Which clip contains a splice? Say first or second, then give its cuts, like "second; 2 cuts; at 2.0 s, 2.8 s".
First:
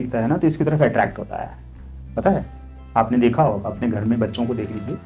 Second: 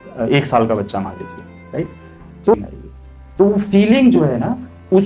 second; 1 cut; at 2.5 s